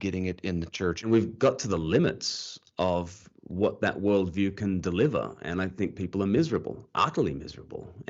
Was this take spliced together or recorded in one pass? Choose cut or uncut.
cut